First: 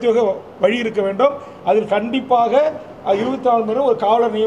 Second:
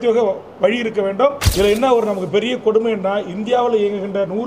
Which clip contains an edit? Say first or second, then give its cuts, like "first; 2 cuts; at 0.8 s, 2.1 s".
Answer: second; 1 cut; at 1.4 s